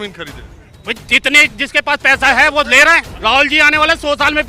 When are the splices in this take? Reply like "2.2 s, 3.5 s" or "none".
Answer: 3.1 s